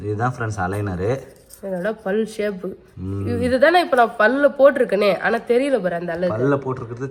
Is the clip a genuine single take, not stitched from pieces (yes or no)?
yes